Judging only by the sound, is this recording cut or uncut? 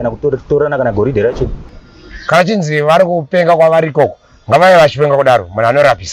cut